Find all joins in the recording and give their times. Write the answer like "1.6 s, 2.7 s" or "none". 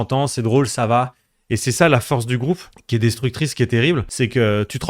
2.7 s, 4.1 s